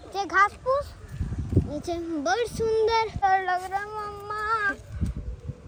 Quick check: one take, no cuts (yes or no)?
yes